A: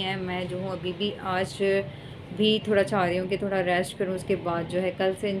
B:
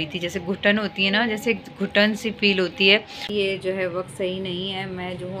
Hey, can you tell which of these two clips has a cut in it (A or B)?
B